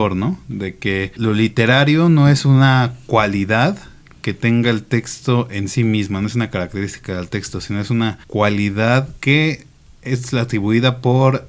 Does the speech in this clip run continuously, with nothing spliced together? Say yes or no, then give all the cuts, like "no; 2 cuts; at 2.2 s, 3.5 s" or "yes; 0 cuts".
no; 3 cuts; at 1.1 s, 8.2 s, 9.1 s